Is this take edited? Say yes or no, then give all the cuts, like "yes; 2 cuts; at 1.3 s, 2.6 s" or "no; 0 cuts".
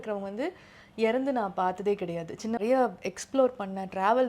yes; 1 cut; at 2.6 s